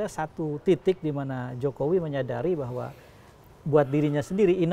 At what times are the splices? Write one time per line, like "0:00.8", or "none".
none